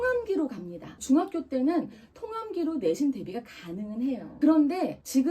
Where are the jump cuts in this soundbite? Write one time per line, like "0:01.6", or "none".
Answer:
0:04.3